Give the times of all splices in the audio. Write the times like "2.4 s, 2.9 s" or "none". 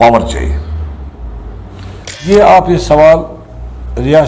2.2 s